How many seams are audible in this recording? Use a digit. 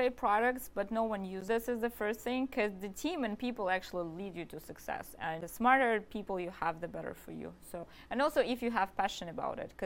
3